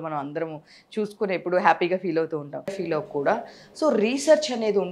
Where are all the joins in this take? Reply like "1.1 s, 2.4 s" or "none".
2.8 s